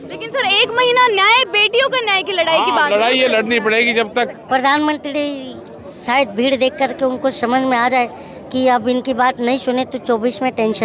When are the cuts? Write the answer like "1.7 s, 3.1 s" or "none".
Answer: 4.3 s

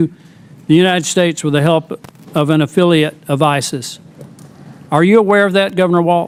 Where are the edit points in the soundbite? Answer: none

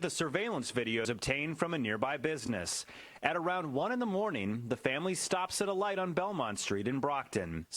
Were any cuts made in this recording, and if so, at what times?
1.0 s

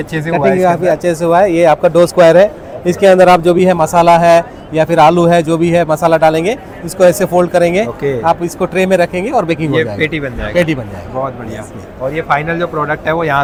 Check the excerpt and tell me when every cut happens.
none

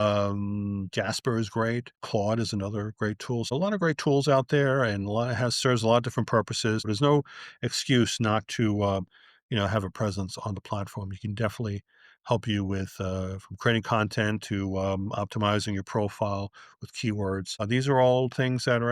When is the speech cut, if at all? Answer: 2.0 s, 3.5 s, 6.9 s, 17.5 s

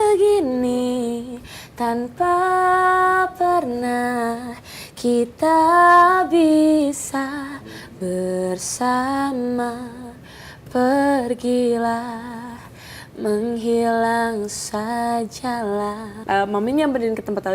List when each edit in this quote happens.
16.1 s

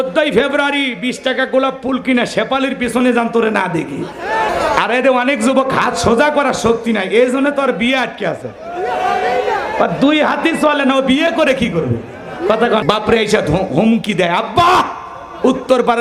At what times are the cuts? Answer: 4.5 s, 12.8 s

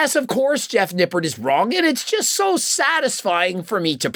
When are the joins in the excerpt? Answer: none

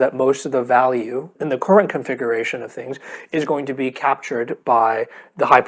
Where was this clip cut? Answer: 1.3 s

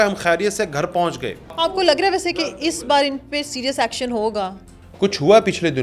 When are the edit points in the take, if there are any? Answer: 1.5 s

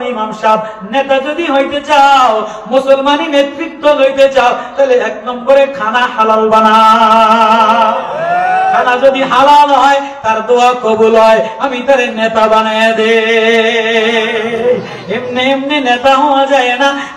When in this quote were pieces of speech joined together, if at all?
none

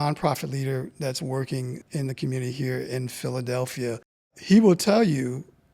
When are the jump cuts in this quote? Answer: 1.8 s, 4.4 s

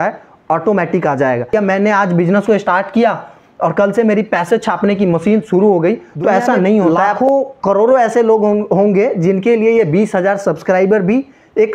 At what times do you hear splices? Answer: 1.5 s, 7.0 s

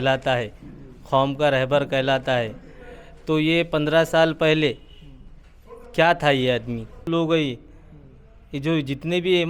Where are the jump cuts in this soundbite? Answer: 7.1 s

